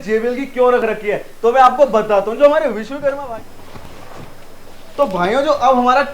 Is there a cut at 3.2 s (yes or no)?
yes